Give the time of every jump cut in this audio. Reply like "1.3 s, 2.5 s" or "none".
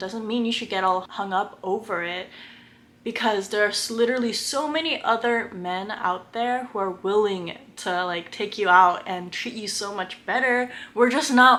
none

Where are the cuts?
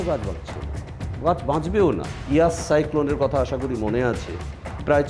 2.2 s

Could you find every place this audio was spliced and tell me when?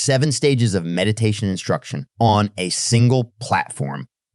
2.0 s

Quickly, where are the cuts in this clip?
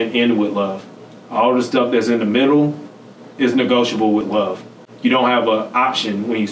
4.3 s

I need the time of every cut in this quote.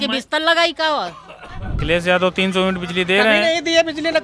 1.6 s

